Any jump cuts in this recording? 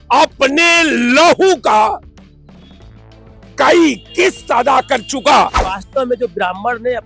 yes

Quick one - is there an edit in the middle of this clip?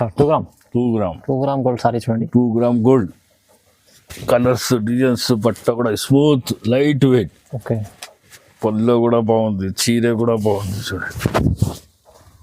no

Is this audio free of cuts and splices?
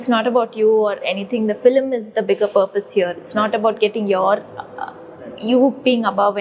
yes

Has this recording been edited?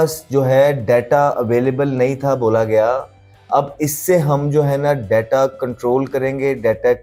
no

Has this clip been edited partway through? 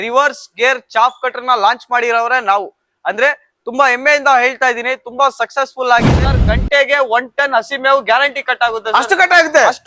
yes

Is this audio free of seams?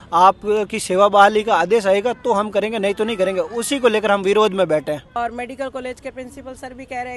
no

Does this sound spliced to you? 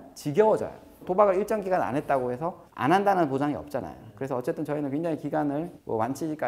yes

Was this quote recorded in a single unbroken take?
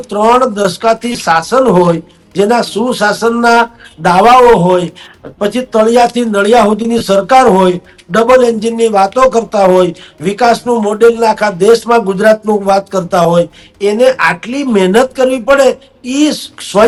yes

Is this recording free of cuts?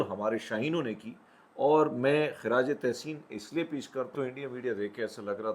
no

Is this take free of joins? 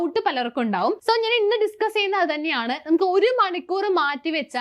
no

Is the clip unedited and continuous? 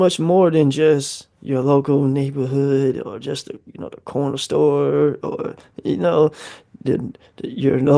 yes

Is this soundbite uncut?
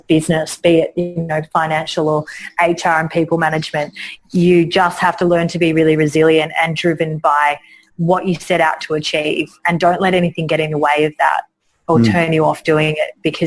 yes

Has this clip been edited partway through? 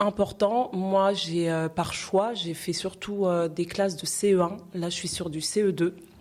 no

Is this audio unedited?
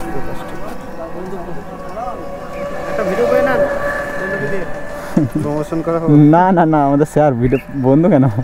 yes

